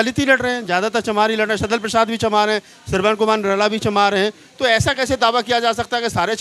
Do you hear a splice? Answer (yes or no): no